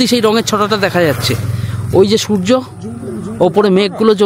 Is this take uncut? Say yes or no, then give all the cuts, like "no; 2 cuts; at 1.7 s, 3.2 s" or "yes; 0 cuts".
yes; 0 cuts